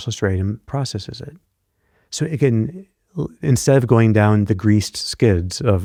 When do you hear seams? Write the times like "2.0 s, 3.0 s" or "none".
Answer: none